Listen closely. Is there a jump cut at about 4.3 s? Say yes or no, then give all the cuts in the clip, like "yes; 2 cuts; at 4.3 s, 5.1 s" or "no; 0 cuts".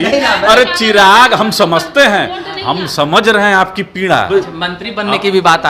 yes; 1 cut; at 4.3 s